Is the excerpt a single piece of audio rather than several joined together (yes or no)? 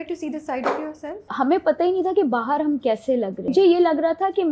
no